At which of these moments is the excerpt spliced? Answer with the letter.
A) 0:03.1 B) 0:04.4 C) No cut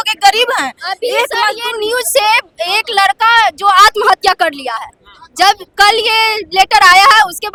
C